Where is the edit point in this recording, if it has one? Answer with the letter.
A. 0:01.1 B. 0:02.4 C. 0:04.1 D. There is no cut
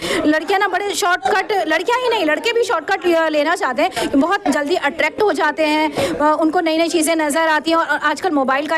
D